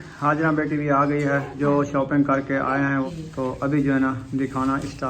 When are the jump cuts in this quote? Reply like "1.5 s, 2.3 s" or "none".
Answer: 1.5 s, 3.1 s